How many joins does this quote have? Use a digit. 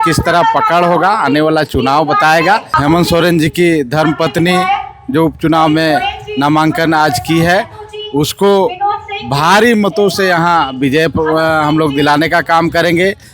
1